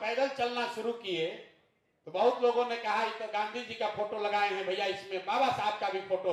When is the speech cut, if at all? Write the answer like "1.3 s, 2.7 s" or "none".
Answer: none